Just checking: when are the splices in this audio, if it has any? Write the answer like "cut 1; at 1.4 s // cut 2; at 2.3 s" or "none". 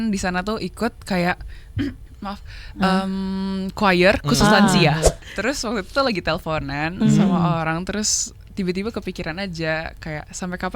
cut 1; at 5.2 s